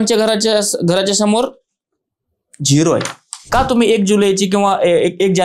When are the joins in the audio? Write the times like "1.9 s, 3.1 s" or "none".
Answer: 3.5 s